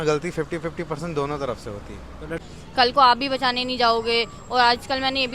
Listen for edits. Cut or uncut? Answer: cut